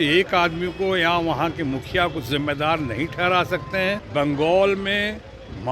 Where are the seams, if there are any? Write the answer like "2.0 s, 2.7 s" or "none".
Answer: 4.0 s